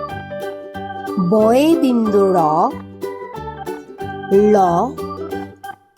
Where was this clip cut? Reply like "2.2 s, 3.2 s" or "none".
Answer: 1.2 s

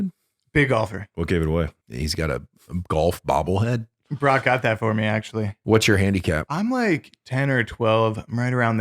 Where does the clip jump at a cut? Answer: 1.0 s, 1.8 s, 5.6 s, 6.5 s

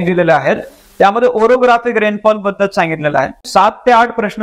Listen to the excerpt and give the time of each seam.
3.4 s

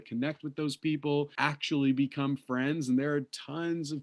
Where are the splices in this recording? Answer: 1.3 s

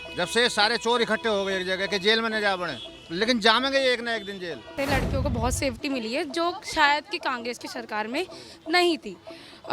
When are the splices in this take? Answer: 4.7 s

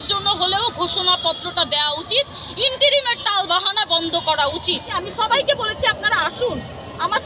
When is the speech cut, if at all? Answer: 4.9 s

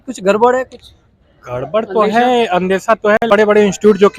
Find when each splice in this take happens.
3.2 s

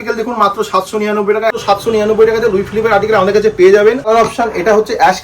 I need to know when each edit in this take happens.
1.6 s, 4.1 s

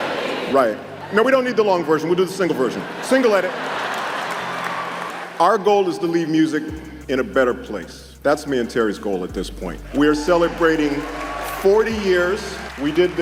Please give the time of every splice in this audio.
none

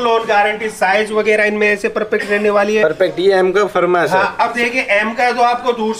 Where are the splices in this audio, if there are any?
none

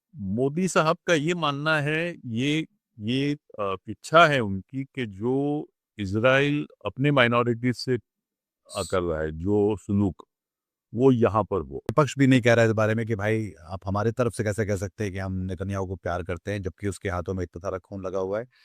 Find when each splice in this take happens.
11.9 s

